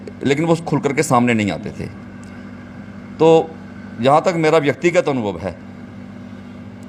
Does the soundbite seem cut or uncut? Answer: uncut